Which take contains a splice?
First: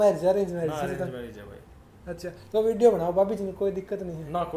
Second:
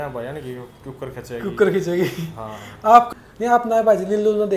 second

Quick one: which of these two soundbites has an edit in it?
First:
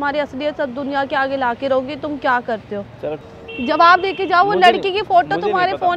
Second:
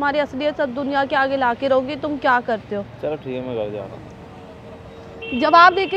first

